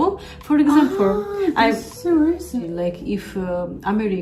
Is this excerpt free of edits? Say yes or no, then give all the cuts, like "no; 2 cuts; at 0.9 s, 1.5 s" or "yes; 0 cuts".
no; 1 cut; at 2.6 s